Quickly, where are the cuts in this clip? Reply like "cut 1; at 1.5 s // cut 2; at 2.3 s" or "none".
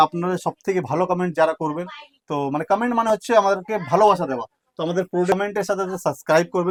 none